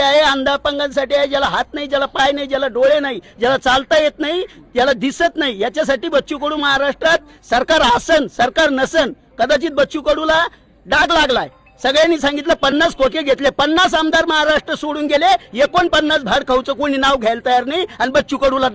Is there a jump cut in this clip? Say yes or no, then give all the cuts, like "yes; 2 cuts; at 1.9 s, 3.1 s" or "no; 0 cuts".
no; 0 cuts